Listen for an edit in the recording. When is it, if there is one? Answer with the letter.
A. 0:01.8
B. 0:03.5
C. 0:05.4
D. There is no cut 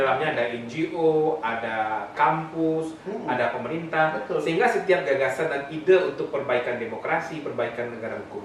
D